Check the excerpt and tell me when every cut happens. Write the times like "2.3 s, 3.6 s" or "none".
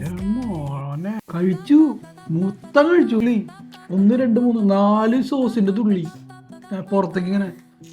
1.2 s, 3.2 s

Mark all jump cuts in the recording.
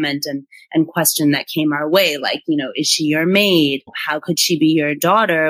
3.9 s

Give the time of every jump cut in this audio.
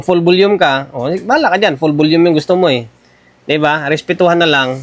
none

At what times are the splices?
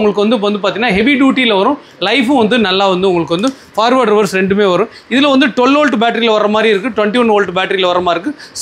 none

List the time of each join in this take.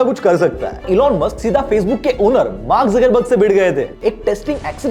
0.8 s, 4.0 s

